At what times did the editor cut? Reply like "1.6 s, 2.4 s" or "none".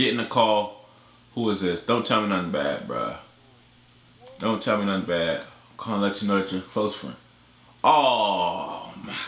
none